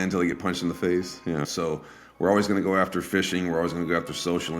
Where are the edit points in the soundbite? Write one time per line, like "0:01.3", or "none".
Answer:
0:01.5

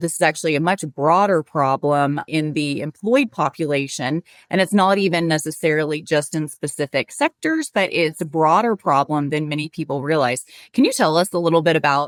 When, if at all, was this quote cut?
none

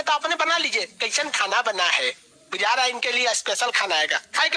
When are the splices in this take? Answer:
none

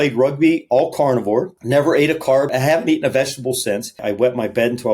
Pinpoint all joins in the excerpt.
0:01.6
0:02.5
0:04.0

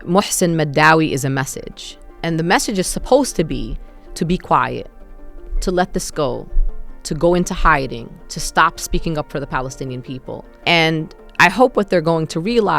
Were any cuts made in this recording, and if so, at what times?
0:10.5

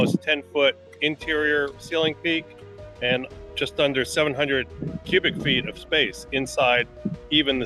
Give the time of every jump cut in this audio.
none

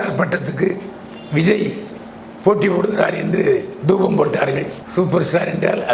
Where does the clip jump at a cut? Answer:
0:04.8

